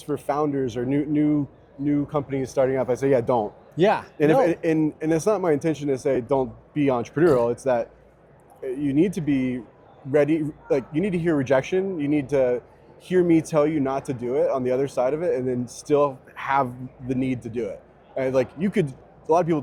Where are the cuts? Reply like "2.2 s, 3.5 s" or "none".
none